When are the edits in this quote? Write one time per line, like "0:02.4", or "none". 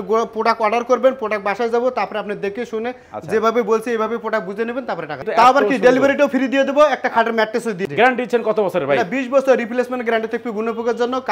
0:05.2
0:07.8